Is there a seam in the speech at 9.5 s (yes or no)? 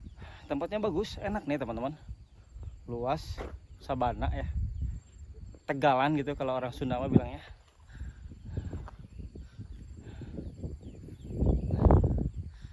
no